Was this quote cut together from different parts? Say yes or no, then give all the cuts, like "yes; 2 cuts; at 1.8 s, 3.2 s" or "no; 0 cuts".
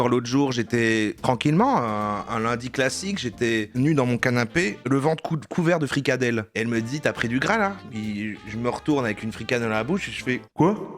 no; 0 cuts